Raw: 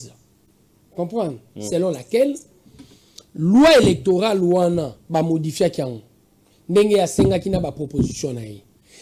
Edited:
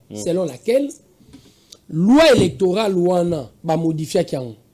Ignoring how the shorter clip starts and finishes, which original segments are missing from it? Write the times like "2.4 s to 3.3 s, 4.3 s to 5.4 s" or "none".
none